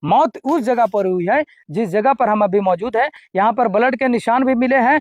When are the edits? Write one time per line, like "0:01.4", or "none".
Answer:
none